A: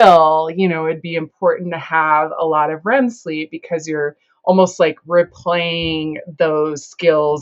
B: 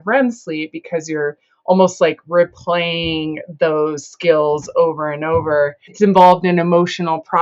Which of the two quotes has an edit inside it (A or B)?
B